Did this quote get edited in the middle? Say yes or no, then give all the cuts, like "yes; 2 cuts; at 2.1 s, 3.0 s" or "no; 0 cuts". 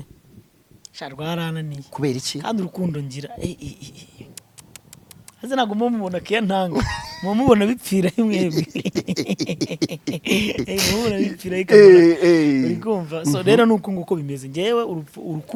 no; 0 cuts